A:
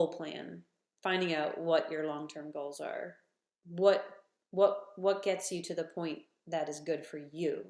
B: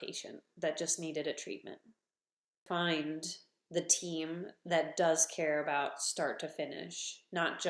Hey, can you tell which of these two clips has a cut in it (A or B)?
B